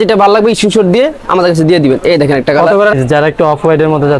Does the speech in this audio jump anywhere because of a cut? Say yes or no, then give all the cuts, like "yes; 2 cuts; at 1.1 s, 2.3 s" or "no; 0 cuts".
yes; 1 cut; at 2.9 s